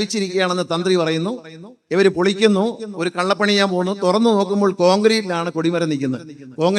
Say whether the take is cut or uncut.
uncut